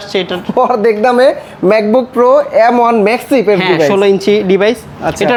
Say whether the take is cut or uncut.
uncut